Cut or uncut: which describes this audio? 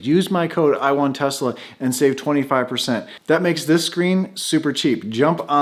uncut